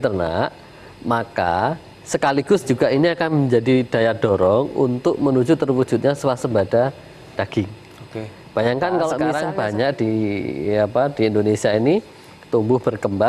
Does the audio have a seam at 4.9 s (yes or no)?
no